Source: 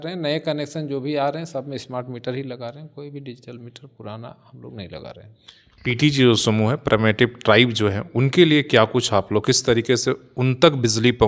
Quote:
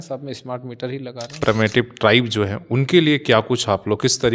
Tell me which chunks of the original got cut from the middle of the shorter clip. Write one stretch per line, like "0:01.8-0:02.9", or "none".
0:02.8-0:06.8